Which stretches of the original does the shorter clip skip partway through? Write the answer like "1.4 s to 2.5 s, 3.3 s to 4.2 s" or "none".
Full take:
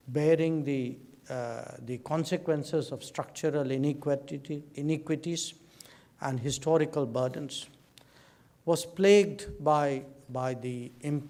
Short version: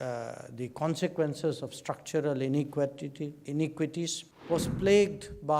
5.6 s to 8.4 s